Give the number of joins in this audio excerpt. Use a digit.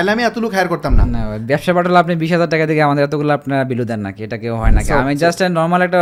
0